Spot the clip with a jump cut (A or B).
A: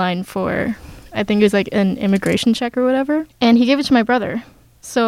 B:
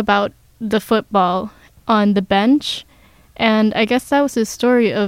A